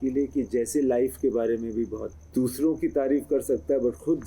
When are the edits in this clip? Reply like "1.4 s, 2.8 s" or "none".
2.0 s